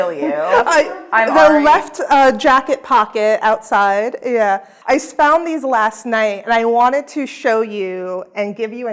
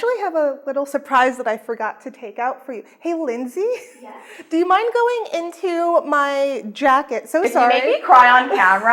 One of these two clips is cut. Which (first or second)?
first